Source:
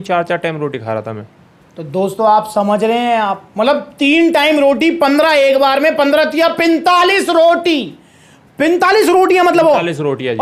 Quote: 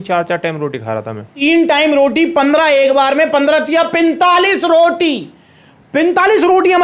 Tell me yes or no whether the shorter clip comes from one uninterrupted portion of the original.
no